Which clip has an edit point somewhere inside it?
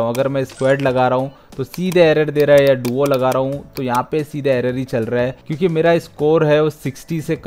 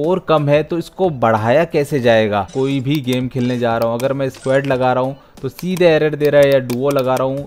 second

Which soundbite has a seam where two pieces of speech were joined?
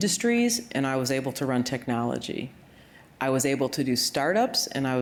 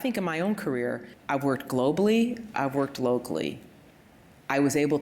second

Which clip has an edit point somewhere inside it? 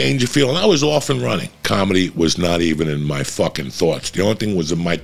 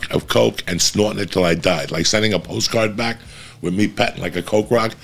first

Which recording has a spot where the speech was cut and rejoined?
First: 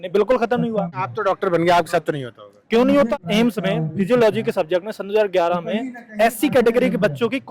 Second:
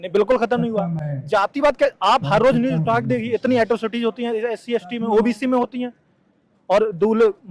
first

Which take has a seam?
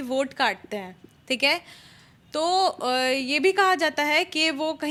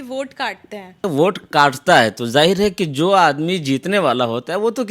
second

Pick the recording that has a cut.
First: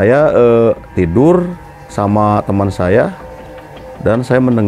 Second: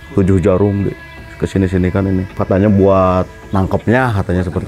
second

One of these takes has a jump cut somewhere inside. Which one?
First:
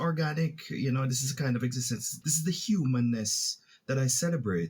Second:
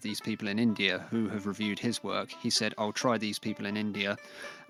first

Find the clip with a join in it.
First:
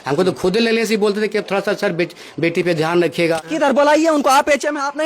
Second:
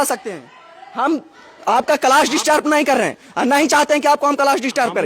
first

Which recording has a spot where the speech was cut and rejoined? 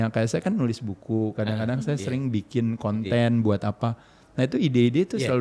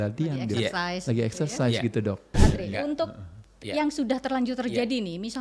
second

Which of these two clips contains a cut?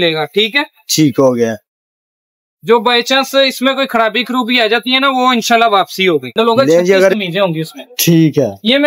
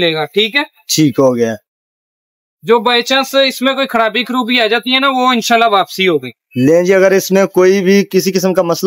first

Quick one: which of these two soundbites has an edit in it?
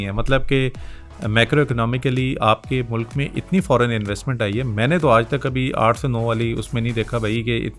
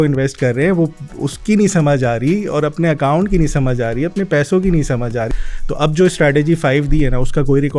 second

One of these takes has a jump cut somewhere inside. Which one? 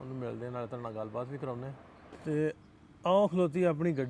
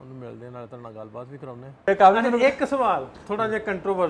second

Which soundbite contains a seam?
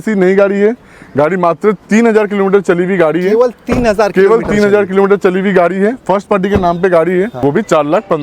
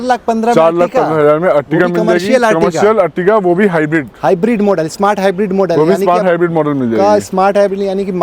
first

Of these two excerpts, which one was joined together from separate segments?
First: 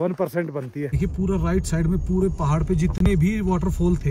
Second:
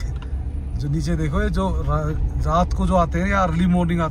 first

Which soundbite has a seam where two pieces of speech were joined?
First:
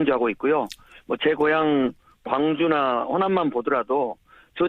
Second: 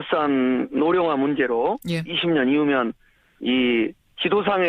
second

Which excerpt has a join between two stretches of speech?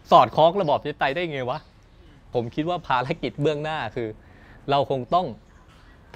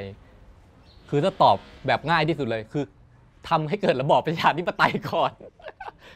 first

